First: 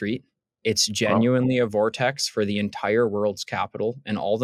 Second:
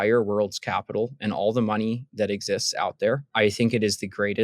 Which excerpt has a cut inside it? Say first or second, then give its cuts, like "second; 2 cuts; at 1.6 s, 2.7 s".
second; 1 cut; at 3.3 s